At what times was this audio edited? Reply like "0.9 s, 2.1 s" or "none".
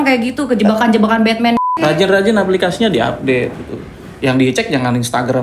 1.6 s